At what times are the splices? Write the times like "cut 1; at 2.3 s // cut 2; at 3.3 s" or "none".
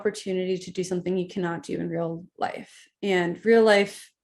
none